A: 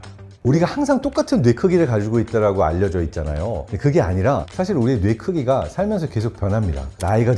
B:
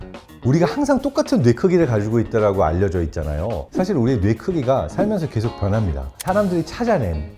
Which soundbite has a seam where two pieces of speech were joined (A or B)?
B